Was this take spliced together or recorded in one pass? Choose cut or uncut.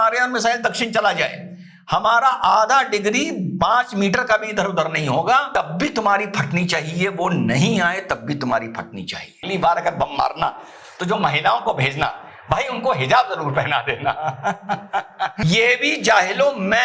cut